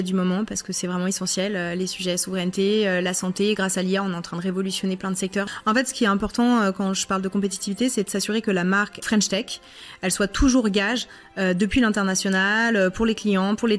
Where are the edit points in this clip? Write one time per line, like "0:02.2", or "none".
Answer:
0:05.5
0:09.0